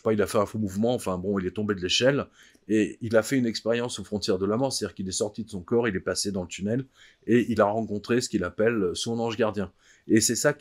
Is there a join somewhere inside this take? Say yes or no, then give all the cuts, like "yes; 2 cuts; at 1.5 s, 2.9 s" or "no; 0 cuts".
no; 0 cuts